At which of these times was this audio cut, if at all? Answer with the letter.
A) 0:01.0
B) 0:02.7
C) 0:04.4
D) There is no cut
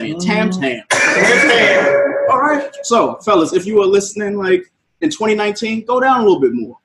B